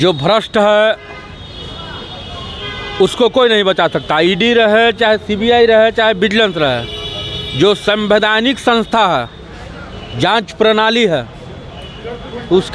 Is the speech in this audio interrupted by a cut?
no; 0 cuts

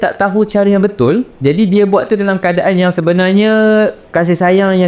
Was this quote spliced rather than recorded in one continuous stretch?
yes; 2 cuts; at 1.3 s, 4.0 s

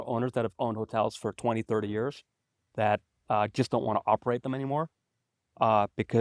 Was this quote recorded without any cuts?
yes; 0 cuts

